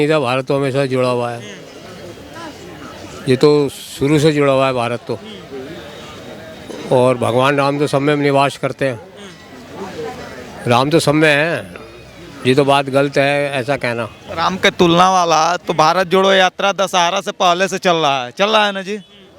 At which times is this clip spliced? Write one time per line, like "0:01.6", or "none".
0:14.2